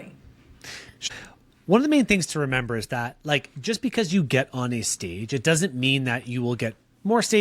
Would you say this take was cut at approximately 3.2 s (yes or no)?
no